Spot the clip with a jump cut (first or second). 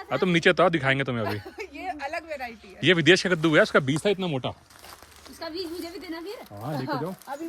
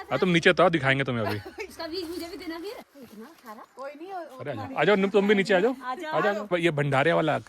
second